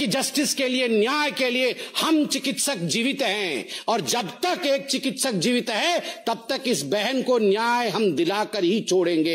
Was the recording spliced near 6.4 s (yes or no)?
no